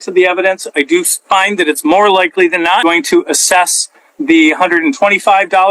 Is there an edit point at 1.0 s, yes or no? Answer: no